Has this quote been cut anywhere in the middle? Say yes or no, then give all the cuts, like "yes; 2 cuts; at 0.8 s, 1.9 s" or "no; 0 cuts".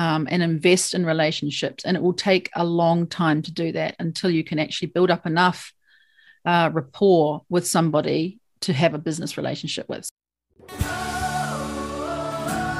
yes; 1 cut; at 10.1 s